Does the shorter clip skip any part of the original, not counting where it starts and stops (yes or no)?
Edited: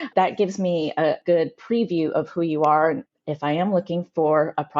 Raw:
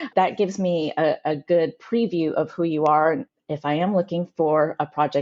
yes